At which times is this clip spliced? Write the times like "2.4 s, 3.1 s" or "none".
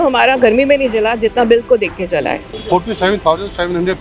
2.5 s